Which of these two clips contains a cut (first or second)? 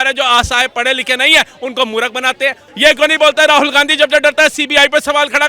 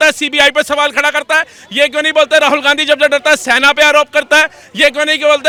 first